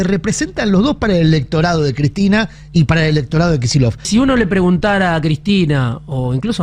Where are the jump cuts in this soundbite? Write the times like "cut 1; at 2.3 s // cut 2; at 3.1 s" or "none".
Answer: cut 1; at 4.1 s